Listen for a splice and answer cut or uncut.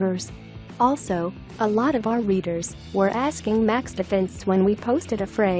cut